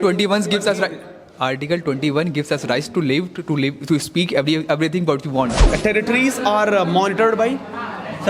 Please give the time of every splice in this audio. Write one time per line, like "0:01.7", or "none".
0:05.7